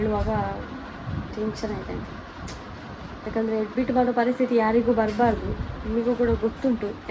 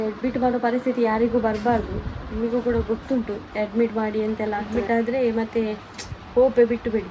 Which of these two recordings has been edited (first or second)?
second